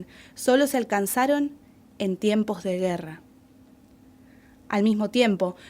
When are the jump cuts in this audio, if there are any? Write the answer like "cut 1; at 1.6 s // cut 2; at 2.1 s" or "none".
cut 1; at 4.0 s